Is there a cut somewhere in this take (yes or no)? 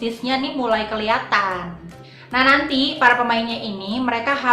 no